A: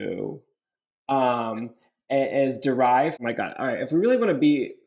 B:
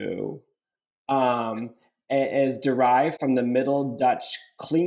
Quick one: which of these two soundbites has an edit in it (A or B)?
A